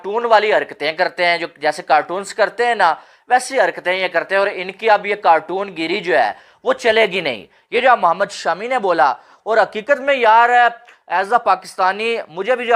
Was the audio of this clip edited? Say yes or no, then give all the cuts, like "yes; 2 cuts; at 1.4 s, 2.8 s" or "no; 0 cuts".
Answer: no; 0 cuts